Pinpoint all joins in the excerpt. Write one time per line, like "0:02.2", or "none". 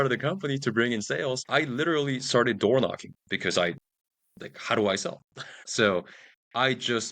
0:01.4
0:05.5

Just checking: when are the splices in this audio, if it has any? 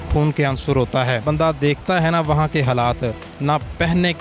0:01.2

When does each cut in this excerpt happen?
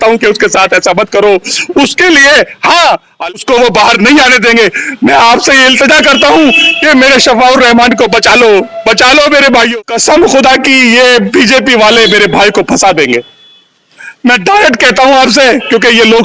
0:03.3
0:09.7

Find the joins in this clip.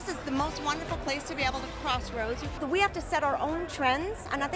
0:02.5

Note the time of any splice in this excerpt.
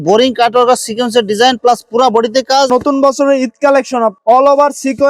0:02.7

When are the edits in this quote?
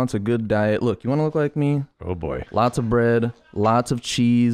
0:02.0

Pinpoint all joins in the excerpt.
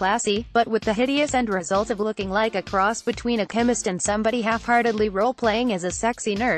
none

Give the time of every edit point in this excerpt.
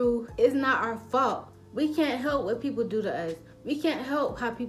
none

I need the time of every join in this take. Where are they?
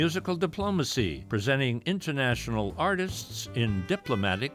0:01.2

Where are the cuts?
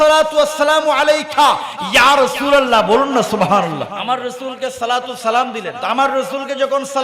0:04.0
0:05.7

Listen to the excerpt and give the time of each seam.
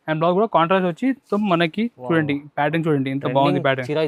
0:01.2

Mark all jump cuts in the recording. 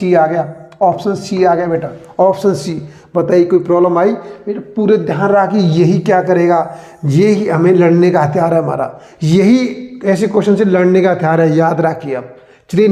none

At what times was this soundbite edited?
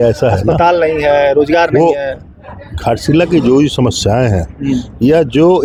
none

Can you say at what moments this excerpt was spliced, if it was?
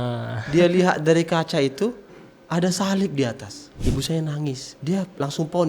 0:03.7
0:04.7

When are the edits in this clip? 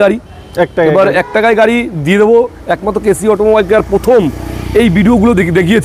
none

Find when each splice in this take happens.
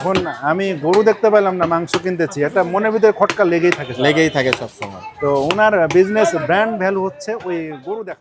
none

